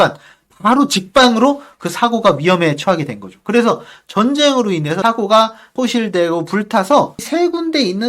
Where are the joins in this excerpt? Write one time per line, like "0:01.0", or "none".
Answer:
0:05.0
0:05.7
0:07.2